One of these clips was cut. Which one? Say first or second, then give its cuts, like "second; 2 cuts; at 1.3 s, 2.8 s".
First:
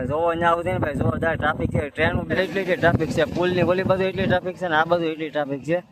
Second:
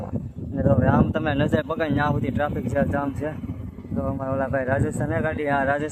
first; 1 cut; at 2.4 s